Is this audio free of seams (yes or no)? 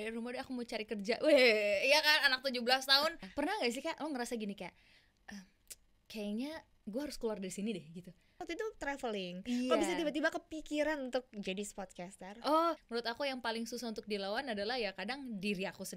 no